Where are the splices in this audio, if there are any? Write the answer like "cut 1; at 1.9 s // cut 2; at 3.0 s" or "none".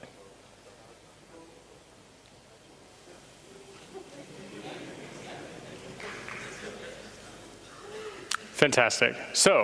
cut 1; at 4.7 s